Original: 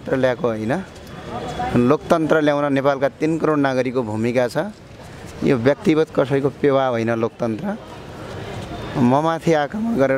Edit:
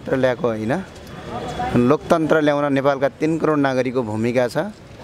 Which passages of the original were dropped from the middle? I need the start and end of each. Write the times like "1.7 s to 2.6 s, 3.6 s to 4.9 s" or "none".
none